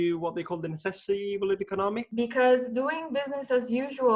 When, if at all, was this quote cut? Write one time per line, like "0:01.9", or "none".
0:01.7